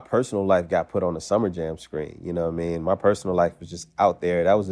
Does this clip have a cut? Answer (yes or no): no